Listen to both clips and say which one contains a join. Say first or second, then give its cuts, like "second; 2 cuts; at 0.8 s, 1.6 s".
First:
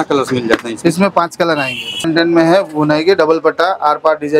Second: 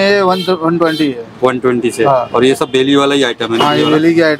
first; 1 cut; at 2.0 s